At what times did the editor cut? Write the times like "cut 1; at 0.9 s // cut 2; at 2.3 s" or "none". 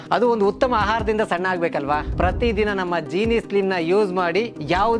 none